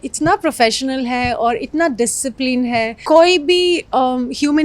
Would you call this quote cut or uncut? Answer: cut